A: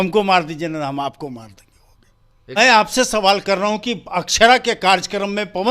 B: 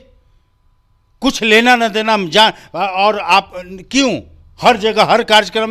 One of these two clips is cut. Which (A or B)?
A